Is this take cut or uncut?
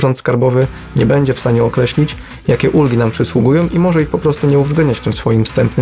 uncut